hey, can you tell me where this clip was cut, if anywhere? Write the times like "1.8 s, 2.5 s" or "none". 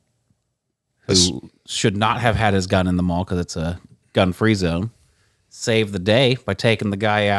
none